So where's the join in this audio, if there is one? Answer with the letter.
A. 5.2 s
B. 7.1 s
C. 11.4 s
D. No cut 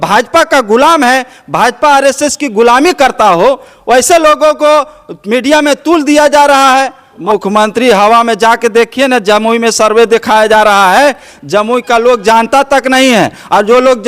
B